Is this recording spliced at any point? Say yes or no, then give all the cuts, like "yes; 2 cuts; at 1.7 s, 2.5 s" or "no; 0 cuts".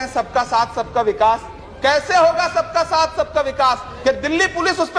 yes; 1 cut; at 3.9 s